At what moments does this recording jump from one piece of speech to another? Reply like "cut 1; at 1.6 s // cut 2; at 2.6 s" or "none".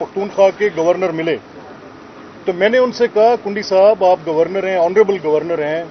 none